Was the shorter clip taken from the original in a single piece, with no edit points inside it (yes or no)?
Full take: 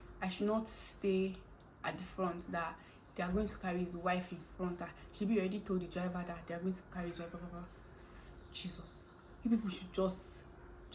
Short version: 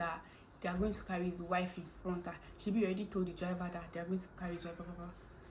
yes